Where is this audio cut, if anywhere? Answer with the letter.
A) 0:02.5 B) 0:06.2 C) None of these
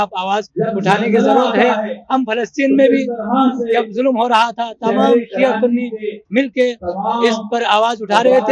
C